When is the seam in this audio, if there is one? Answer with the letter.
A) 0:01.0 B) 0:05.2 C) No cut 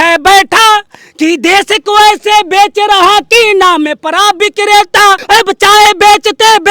B